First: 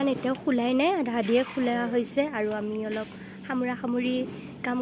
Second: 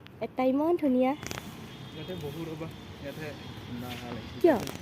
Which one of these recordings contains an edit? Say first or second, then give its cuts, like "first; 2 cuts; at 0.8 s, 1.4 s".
second; 1 cut; at 1.2 s